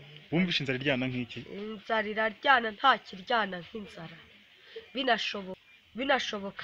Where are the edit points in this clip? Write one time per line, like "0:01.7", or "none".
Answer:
0:05.6